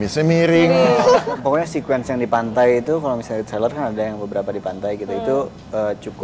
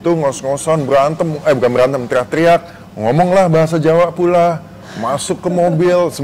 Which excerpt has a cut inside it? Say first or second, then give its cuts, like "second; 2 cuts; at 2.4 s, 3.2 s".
first; 1 cut; at 1.3 s